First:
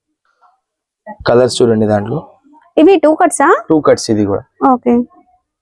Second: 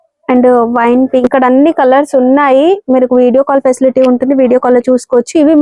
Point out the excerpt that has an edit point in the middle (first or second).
second